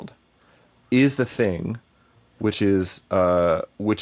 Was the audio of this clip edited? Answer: no; 0 cuts

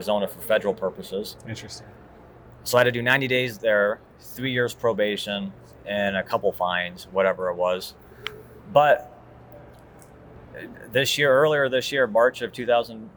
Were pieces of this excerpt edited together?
no; 0 cuts

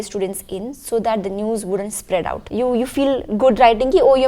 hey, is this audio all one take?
no; 1 cut; at 2.4 s

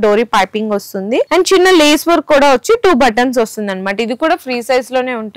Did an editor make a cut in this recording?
no; 0 cuts

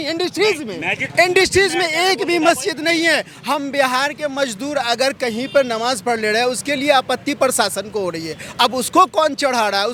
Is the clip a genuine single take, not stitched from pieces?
yes; 0 cuts

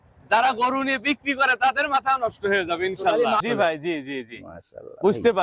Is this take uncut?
no; 1 cut; at 3.4 s

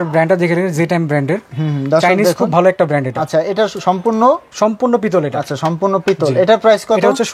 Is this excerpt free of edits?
yes; 0 cuts

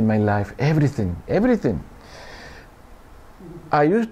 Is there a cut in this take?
no; 0 cuts

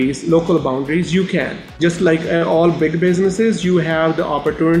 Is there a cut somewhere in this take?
yes; 1 cut; at 1.6 s

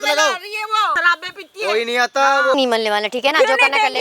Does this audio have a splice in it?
yes; 2 cuts; at 1.0 s, 2.6 s

